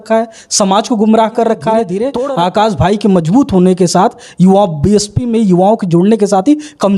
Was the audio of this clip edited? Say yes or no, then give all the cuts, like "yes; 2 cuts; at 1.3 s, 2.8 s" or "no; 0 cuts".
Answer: yes; 1 cut; at 2.0 s